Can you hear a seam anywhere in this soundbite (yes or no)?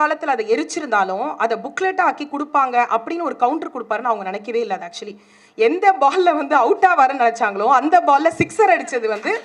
no